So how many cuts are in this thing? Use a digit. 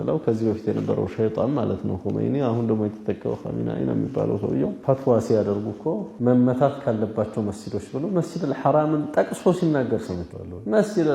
1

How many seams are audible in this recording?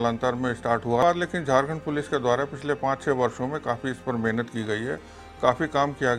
1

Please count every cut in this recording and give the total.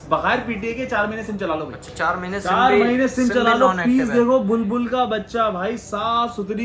1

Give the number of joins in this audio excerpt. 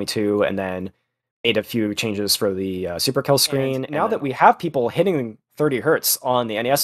1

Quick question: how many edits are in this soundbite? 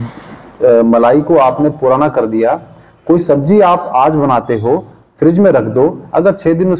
0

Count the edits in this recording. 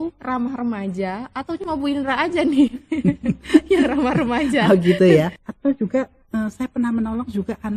1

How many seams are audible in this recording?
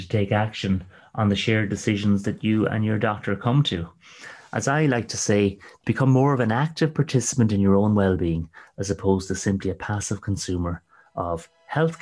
0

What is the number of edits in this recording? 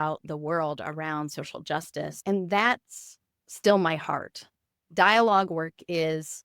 1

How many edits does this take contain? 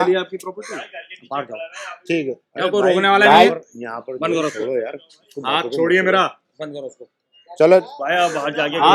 0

